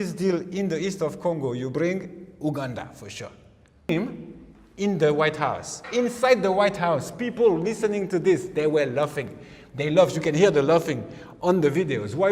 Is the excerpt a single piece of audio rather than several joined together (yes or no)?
no